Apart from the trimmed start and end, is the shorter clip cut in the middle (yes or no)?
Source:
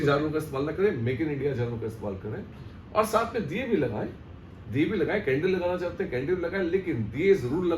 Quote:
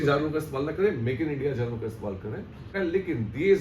yes